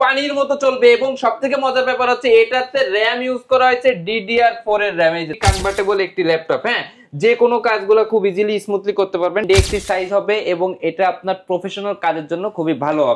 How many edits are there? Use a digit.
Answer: 2